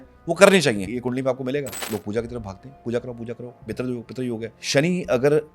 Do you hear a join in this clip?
yes; 3 cuts; at 0.9 s, 1.8 s, 4.5 s

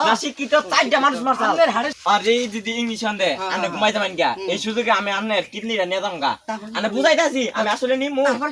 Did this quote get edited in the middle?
yes; 1 cut; at 1.9 s

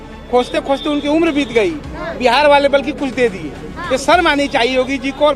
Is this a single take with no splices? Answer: yes; 0 cuts

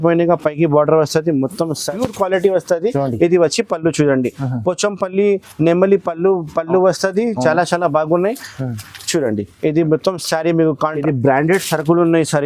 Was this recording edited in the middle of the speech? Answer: yes; 2 cuts; at 1.9 s, 10.9 s

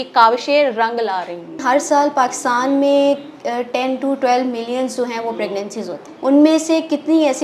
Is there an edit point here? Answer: yes; 2 cuts; at 1.6 s, 6.0 s

